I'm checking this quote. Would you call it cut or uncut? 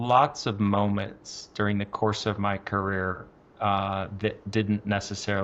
uncut